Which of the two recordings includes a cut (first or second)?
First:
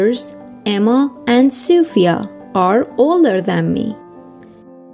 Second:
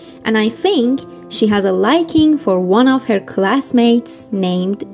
first